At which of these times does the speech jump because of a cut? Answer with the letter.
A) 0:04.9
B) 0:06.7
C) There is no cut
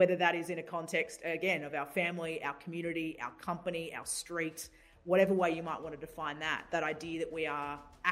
B